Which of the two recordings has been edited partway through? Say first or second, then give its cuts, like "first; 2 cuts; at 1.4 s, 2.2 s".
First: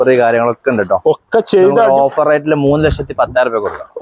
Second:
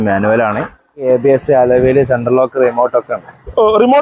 second; 1 cut; at 1.0 s